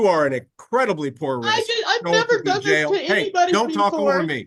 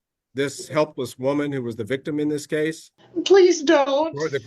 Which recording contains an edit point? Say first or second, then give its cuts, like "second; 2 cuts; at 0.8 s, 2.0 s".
second; 1 cut; at 2.9 s